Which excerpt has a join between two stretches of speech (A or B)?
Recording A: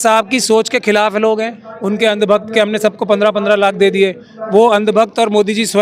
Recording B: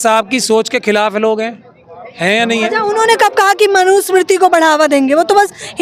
A